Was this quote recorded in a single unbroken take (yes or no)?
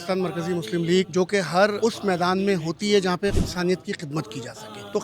no